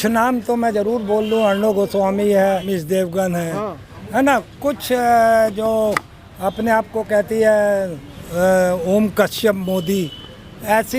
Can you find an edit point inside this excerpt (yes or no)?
yes